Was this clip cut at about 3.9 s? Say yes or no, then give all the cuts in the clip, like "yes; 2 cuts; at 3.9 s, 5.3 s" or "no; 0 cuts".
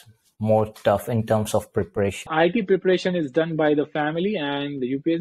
no; 1 cut; at 2.3 s